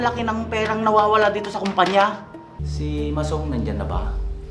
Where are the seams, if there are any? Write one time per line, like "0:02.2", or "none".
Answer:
0:02.6